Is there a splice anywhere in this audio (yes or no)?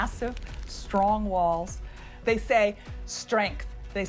yes